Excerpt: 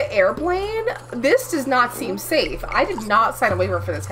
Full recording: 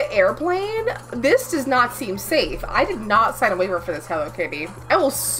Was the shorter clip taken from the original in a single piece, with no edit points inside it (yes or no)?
yes